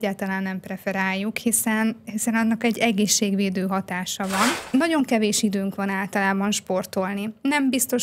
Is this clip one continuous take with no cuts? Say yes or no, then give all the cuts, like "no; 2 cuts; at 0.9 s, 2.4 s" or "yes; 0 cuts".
no; 1 cut; at 4.6 s